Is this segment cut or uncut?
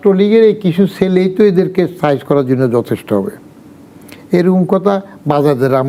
uncut